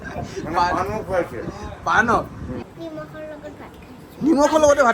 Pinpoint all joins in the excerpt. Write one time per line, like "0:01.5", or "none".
0:02.6